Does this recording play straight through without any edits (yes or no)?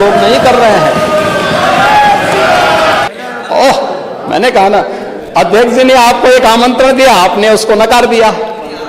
no